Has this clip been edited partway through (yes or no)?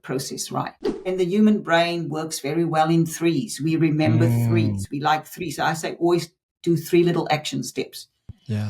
yes